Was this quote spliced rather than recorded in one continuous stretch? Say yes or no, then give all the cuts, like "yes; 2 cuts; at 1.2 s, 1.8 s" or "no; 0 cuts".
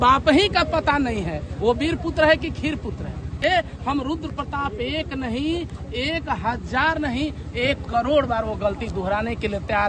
yes; 1 cut; at 3.4 s